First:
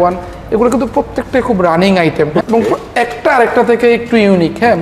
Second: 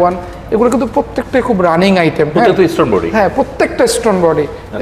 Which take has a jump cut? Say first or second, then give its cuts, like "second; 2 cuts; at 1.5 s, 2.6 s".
first; 1 cut; at 2.4 s